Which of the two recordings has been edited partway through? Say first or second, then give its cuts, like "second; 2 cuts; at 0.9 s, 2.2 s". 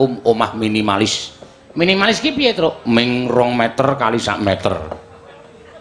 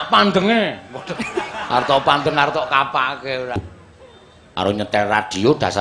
second; 1 cut; at 3.6 s